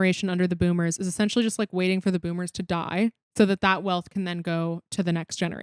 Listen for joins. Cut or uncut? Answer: uncut